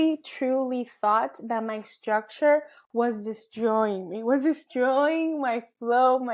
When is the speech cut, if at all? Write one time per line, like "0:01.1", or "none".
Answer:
none